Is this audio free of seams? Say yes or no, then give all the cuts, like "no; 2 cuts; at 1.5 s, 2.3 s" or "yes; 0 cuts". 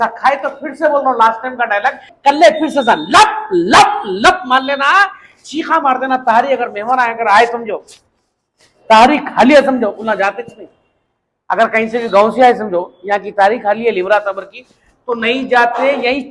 no; 1 cut; at 2.1 s